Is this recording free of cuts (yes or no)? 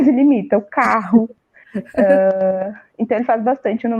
yes